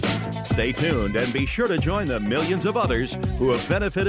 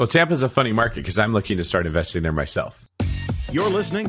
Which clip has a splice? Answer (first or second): second